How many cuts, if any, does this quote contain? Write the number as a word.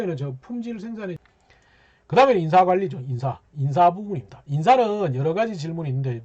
one